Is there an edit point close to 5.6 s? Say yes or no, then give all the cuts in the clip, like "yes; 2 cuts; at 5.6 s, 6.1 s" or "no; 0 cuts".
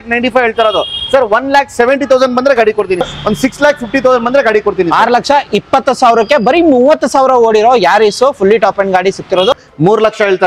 no; 2 cuts; at 3.0 s, 9.5 s